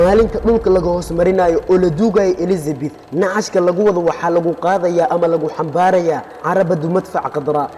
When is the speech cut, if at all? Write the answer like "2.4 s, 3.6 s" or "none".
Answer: none